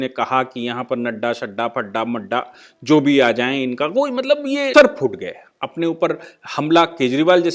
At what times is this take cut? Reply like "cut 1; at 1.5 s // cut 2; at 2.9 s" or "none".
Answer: cut 1; at 4.7 s